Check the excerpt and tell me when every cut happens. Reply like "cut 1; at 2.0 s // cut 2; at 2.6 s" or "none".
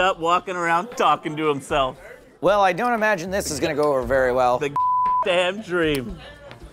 none